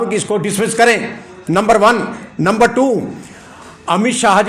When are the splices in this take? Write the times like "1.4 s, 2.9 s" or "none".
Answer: none